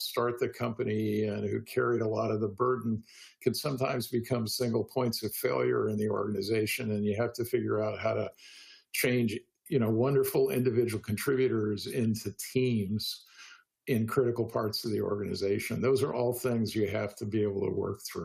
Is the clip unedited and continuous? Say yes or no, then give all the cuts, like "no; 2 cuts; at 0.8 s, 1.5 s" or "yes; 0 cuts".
yes; 0 cuts